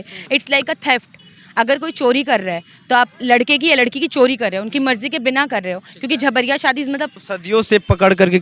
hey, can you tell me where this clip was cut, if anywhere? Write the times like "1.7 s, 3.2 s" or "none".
7.3 s